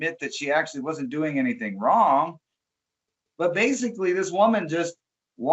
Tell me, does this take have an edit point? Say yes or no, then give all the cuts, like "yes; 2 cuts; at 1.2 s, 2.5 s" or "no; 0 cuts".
no; 0 cuts